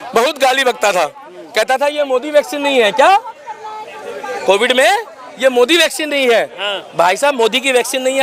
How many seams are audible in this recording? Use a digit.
0